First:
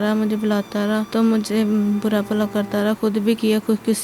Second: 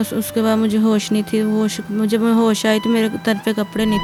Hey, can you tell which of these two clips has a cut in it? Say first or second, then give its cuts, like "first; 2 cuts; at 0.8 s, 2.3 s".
first; 1 cut; at 1.1 s